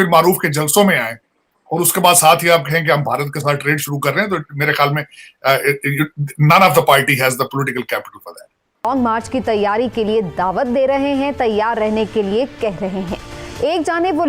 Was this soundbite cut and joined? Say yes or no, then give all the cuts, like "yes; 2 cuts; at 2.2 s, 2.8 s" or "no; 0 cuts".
no; 0 cuts